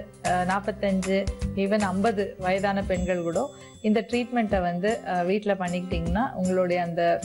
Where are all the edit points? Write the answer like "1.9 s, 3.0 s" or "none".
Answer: none